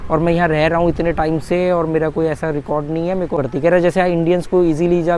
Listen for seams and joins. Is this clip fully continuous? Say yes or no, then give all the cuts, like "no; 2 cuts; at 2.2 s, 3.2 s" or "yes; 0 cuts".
no; 1 cut; at 3.4 s